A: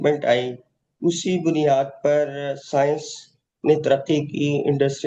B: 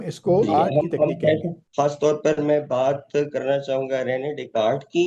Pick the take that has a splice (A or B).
B